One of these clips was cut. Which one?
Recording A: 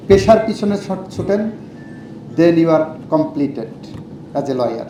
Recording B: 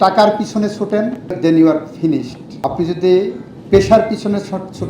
B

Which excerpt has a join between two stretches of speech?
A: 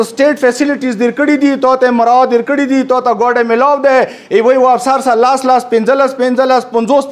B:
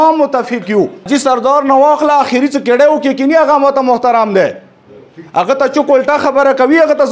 B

